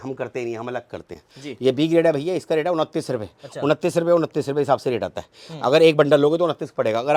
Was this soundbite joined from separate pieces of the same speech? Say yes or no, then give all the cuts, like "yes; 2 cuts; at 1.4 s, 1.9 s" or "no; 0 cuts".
no; 0 cuts